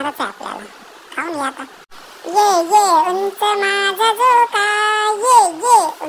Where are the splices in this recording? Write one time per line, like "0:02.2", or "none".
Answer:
0:01.8